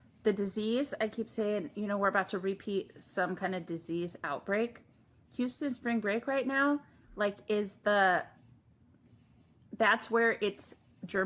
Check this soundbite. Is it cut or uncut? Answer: uncut